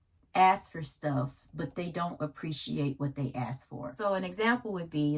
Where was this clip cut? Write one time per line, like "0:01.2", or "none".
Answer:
0:03.9